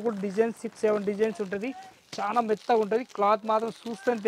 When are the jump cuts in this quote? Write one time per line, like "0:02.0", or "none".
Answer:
none